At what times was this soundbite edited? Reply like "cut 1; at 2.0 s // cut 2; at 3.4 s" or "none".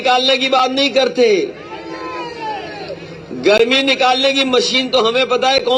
none

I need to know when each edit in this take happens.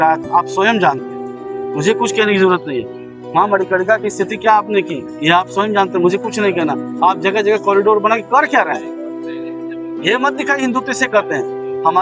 none

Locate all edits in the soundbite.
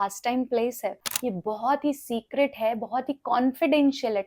cut 1; at 1.1 s

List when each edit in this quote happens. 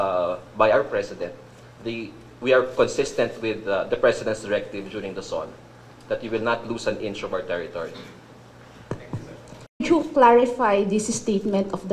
cut 1; at 9.8 s

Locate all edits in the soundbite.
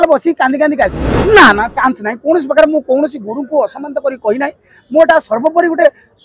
cut 1; at 1.1 s

